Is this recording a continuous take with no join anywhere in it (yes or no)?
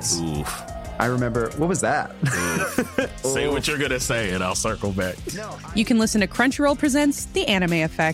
yes